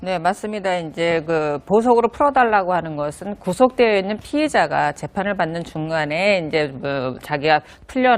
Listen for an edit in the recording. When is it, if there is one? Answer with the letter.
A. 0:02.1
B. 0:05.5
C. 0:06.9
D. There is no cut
B